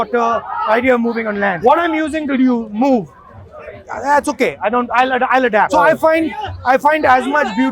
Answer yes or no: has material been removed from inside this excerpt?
yes